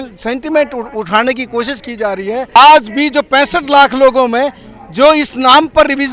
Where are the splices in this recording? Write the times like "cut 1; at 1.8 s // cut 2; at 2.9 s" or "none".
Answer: cut 1; at 2.6 s